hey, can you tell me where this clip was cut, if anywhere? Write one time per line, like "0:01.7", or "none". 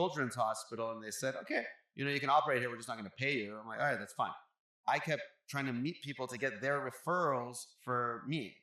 0:04.7